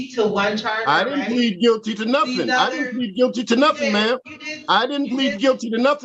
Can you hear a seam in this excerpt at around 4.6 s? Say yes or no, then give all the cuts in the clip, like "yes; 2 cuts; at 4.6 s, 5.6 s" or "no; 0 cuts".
no; 0 cuts